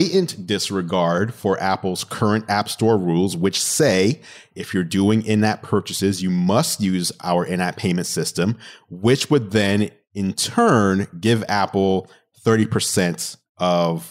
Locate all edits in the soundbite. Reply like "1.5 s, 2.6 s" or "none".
none